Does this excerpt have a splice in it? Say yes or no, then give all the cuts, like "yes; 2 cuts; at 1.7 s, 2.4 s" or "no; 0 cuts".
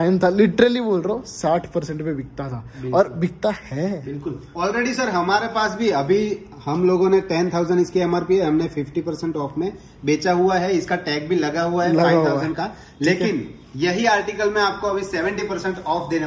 no; 0 cuts